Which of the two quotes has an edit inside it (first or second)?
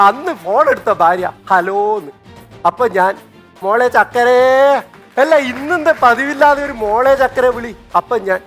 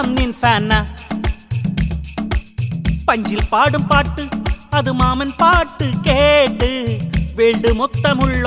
first